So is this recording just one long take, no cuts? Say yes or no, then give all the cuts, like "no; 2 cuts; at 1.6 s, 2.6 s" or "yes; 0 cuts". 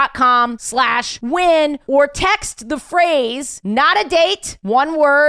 yes; 0 cuts